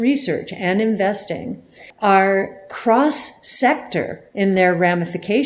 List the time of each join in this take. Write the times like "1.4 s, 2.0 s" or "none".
1.9 s